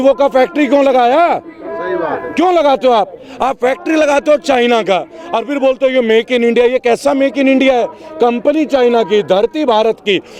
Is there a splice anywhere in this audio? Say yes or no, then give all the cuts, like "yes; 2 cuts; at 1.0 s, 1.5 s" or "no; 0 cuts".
no; 0 cuts